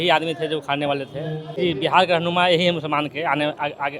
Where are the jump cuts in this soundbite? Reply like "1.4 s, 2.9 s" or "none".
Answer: 1.4 s